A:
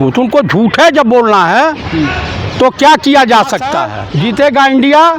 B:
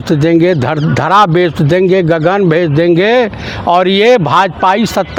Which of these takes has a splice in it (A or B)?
A